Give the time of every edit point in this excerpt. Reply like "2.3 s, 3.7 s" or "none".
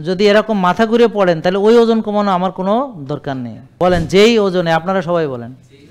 3.7 s